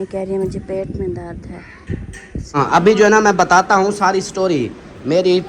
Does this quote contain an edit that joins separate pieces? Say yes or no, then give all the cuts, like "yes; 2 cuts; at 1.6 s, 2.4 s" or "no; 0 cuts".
yes; 1 cut; at 2.6 s